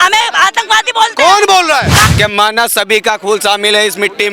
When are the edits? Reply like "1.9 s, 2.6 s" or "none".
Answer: 2.0 s